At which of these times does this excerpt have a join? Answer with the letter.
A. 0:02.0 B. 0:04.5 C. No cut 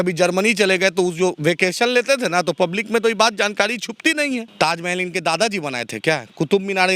B